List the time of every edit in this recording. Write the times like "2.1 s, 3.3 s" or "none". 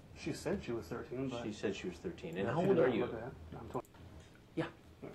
3.8 s